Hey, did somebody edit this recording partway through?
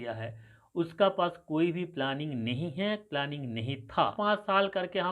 yes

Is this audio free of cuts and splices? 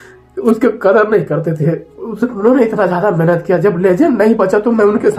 yes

